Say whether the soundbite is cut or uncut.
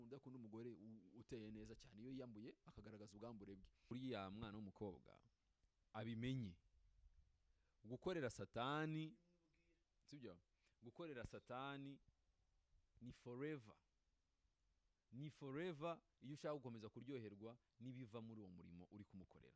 cut